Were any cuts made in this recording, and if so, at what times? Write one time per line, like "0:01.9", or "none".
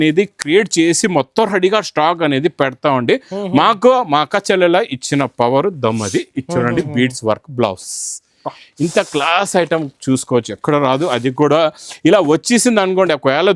none